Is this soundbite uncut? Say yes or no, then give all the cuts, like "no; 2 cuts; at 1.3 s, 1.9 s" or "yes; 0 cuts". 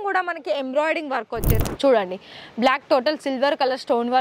no; 1 cut; at 1.6 s